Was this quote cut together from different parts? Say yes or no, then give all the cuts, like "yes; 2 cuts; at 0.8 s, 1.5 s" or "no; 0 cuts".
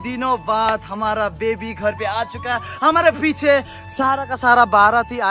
no; 0 cuts